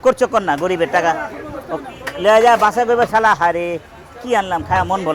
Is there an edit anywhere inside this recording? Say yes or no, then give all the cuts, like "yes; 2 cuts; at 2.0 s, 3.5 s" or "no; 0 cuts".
no; 0 cuts